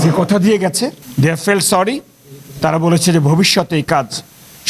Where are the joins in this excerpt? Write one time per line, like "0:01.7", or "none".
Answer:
0:01.0